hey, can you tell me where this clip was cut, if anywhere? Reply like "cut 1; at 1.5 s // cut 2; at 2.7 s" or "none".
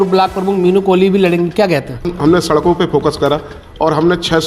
cut 1; at 2.1 s